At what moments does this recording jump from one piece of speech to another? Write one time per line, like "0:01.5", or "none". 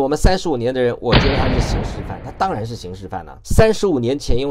0:03.4